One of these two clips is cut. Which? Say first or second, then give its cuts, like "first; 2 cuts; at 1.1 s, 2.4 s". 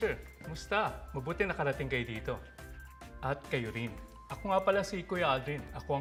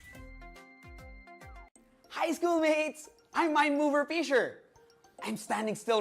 second; 1 cut; at 1.7 s